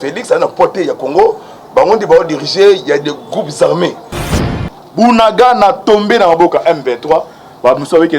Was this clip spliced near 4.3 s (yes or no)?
yes